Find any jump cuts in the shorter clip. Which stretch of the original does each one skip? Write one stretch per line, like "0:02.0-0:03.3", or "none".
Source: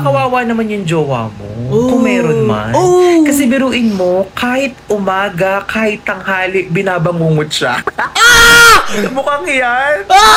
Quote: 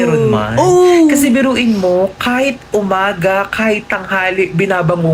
none